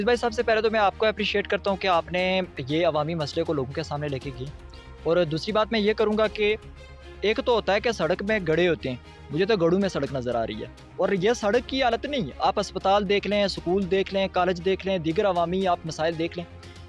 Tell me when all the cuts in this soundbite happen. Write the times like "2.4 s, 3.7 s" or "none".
none